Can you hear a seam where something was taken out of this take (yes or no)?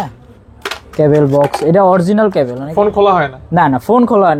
yes